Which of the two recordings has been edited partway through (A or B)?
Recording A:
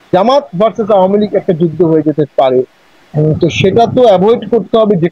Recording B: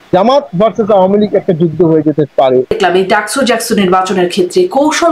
B